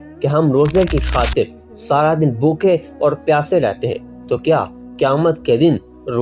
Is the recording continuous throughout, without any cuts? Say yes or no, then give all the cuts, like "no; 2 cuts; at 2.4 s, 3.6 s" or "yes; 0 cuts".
yes; 0 cuts